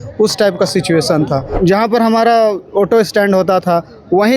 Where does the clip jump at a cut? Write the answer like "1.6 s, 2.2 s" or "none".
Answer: 1.5 s